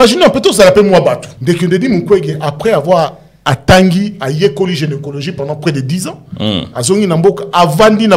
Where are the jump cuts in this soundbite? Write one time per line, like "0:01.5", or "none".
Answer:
0:01.3

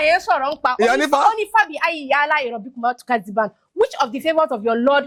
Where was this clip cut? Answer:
none

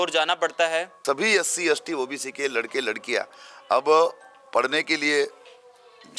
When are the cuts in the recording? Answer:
0:00.9

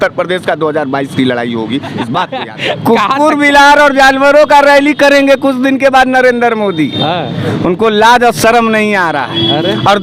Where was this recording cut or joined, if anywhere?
0:02.4

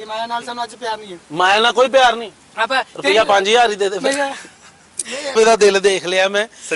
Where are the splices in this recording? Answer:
0:05.3

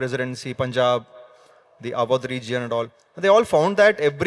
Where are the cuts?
none

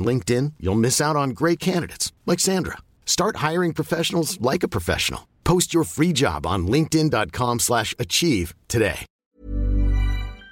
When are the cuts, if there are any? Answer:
0:09.1

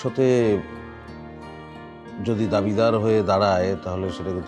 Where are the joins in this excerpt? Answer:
none

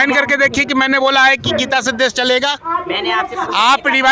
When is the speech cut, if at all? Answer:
none

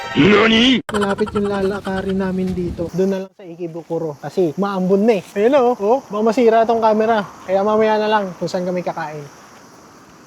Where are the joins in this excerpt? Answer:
0:00.9
0:02.9

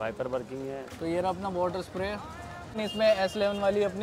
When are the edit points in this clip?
0:00.9
0:02.8

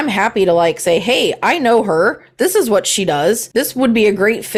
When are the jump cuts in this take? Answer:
none

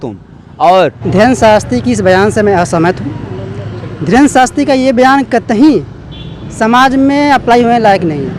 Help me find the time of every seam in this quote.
0:01.0

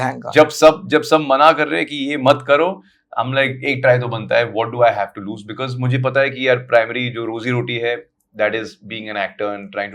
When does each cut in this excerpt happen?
none

